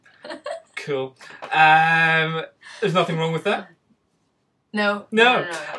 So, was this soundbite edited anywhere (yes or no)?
no